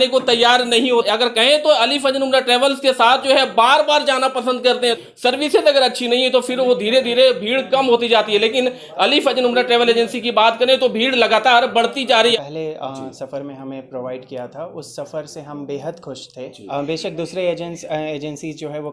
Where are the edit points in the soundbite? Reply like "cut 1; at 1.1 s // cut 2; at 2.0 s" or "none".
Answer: cut 1; at 1.0 s // cut 2; at 4.9 s // cut 3; at 12.4 s // cut 4; at 16.6 s